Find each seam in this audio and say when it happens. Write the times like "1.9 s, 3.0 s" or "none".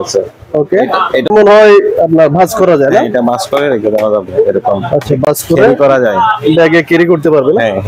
none